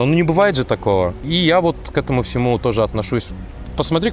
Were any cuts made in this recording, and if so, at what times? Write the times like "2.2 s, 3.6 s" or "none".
1.2 s